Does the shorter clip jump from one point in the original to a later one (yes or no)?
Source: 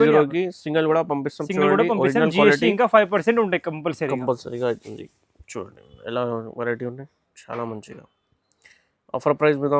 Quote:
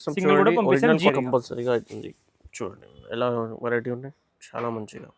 yes